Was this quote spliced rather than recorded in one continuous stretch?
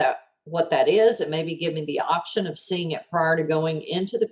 no; 0 cuts

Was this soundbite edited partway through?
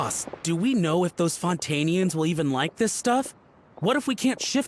no; 0 cuts

